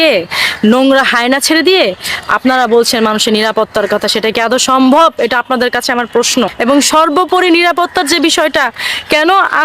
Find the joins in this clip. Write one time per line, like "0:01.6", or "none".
0:06.5

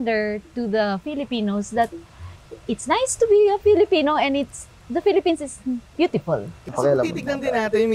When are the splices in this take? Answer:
0:06.7

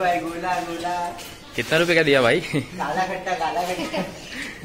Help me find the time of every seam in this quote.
none

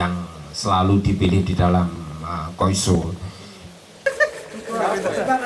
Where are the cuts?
0:04.1

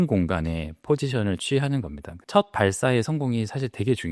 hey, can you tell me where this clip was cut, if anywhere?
0:02.2

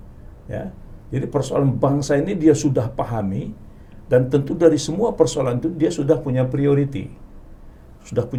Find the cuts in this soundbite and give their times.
none

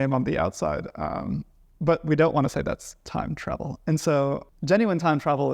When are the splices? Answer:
0:04.5

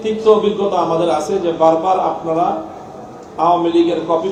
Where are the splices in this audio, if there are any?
none

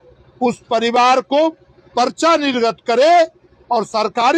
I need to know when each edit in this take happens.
none

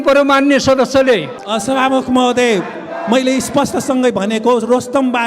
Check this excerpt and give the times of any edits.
0:01.4

